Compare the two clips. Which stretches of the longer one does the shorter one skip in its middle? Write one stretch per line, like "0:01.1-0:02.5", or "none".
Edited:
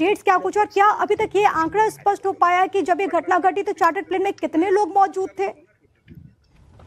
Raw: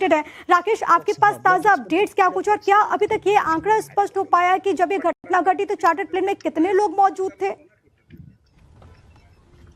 0:05.2-0:05.3